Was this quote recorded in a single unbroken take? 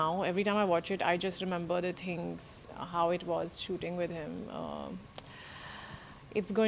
yes; 0 cuts

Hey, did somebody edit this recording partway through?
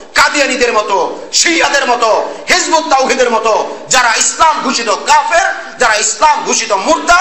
no; 0 cuts

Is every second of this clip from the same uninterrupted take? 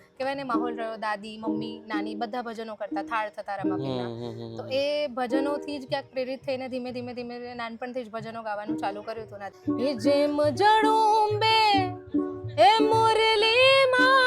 no; 1 cut; at 9.5 s

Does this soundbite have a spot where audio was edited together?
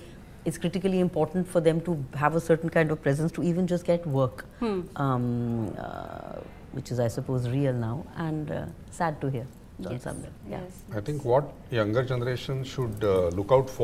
no; 0 cuts

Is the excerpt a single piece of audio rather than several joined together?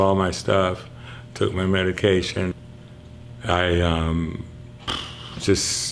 no; 1 cut; at 2.5 s

